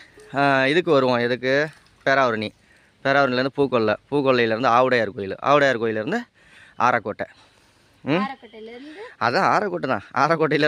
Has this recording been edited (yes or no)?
no